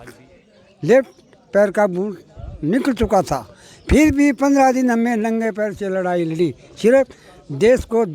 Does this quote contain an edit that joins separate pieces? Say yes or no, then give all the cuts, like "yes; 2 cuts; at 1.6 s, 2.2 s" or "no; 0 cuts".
no; 0 cuts